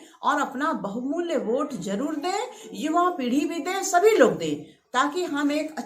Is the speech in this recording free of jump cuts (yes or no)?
yes